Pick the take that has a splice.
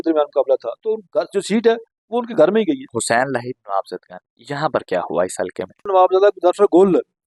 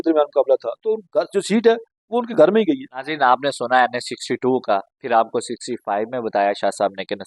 first; 2 cuts; at 2.9 s, 5.9 s

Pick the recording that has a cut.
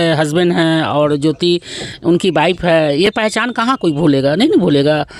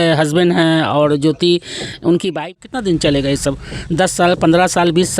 second; 1 cut; at 2.5 s

